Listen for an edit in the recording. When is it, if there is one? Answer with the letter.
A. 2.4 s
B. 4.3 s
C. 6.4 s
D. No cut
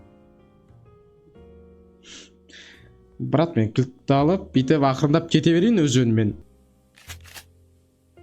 C